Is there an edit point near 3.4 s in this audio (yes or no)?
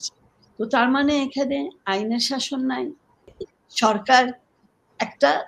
yes